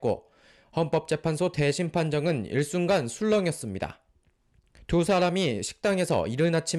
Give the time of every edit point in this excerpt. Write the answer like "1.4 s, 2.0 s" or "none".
none